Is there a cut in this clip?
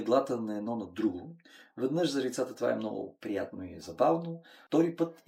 no; 0 cuts

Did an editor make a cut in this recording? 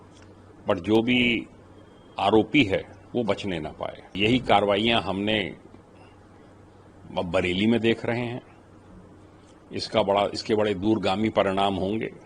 yes; 1 cut; at 4.2 s

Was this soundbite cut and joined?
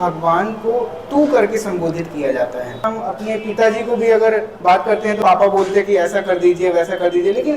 yes; 2 cuts; at 2.8 s, 5.2 s

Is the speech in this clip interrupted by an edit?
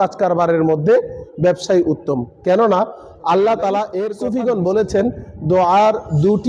yes; 1 cut; at 4.2 s

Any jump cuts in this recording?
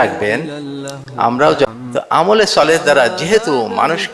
yes; 1 cut; at 1.7 s

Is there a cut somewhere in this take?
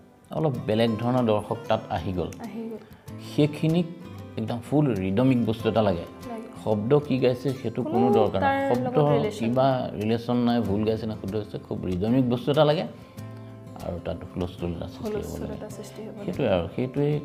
no; 0 cuts

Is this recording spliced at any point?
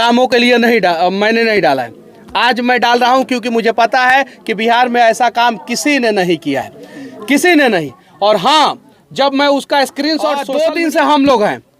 yes; 1 cut; at 10.4 s

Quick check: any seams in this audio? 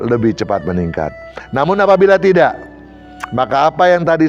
no; 0 cuts

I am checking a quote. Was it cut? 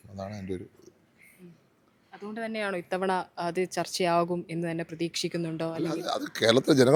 no; 0 cuts

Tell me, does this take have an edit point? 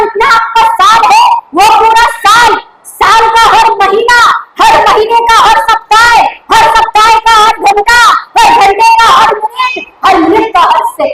no; 0 cuts

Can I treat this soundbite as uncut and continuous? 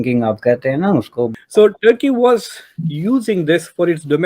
no; 1 cut; at 1.3 s

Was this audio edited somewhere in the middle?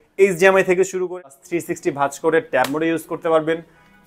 yes; 1 cut; at 0.9 s

